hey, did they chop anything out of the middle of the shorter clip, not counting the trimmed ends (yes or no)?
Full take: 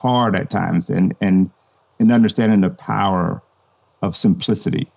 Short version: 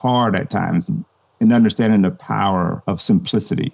yes